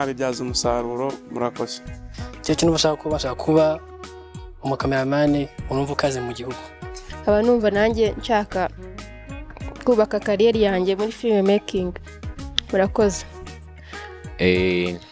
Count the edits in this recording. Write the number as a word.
zero